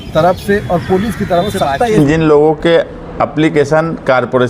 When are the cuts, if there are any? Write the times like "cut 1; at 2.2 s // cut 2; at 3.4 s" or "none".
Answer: cut 1; at 1.9 s

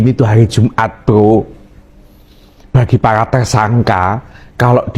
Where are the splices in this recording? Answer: none

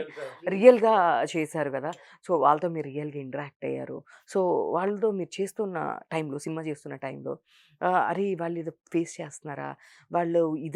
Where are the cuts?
none

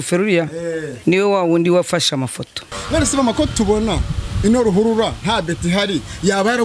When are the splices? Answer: cut 1; at 2.7 s

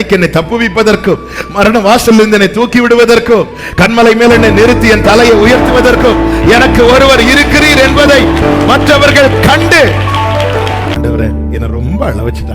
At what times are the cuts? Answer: cut 1; at 10.9 s

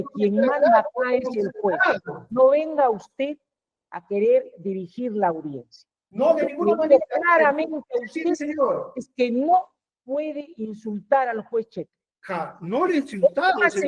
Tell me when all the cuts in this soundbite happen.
none

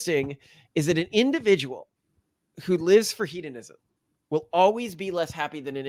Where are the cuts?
none

